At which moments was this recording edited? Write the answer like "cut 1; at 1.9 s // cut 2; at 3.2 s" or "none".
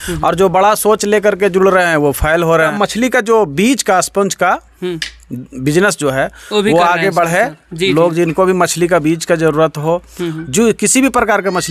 cut 1; at 2.7 s

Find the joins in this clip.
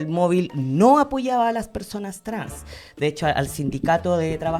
none

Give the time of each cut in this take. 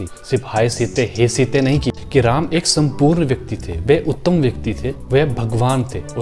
cut 1; at 1.9 s

